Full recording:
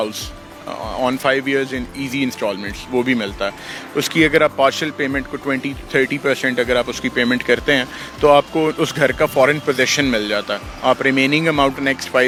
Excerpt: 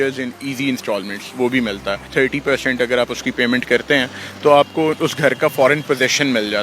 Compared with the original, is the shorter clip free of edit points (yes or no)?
no